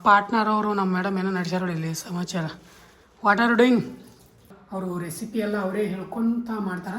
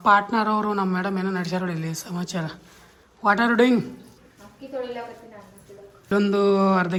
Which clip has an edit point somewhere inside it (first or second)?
first